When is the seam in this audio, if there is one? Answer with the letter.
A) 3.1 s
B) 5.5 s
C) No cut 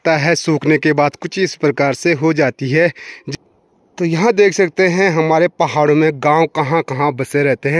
A